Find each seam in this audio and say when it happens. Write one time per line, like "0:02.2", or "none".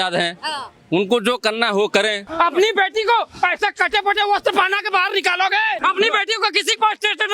0:02.3
0:05.8